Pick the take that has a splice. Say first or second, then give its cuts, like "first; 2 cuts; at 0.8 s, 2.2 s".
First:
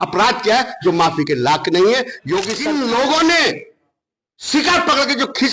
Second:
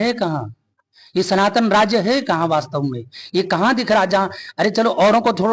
first; 1 cut; at 2.5 s